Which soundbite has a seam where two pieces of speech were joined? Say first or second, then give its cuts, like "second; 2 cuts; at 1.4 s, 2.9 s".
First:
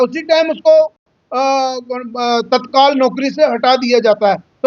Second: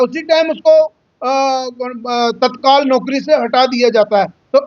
second; 1 cut; at 1.1 s